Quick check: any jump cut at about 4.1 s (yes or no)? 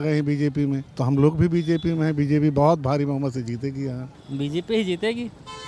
yes